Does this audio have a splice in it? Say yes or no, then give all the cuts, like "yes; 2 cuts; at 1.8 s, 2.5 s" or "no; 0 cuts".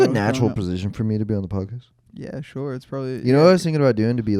no; 0 cuts